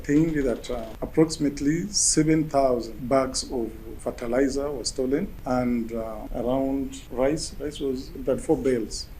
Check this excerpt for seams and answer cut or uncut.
cut